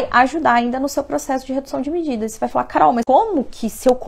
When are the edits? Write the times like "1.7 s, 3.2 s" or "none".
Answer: 3.0 s

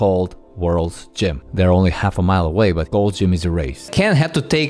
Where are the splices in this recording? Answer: 1.4 s, 2.9 s, 3.9 s

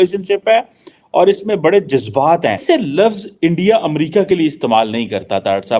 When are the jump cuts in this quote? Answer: 2.6 s

